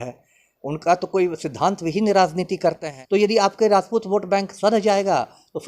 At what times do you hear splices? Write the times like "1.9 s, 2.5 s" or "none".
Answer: 2.9 s